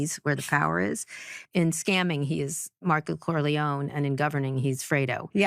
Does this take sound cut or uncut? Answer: cut